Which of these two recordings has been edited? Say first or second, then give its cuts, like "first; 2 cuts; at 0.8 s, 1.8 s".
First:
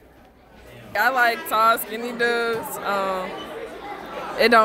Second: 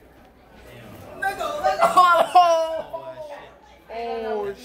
first; 1 cut; at 0.9 s